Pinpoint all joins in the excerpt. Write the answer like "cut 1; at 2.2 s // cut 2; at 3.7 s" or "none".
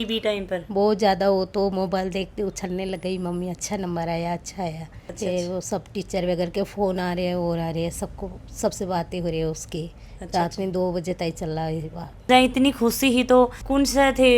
none